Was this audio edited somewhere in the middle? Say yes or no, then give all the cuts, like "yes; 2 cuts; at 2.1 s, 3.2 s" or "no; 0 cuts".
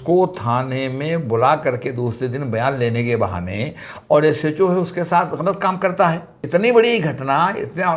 yes; 1 cut; at 6.3 s